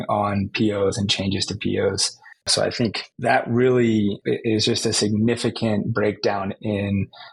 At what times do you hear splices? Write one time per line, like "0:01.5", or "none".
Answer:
none